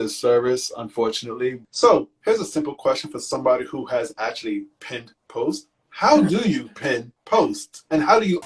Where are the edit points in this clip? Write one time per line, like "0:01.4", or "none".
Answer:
0:01.6